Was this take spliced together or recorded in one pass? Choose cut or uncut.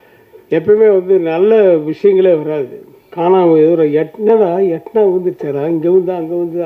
cut